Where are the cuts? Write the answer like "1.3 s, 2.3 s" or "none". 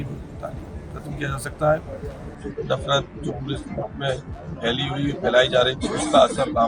2.3 s